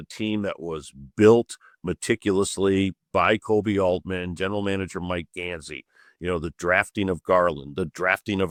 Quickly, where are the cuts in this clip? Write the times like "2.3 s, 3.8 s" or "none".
none